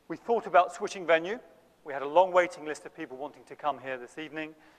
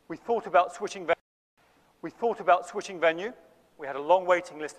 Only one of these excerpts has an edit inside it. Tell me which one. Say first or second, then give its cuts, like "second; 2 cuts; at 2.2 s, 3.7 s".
first; 1 cut; at 1.1 s